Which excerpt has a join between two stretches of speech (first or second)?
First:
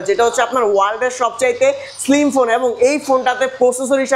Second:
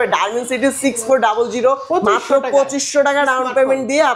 second